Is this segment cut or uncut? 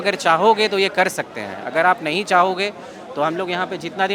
uncut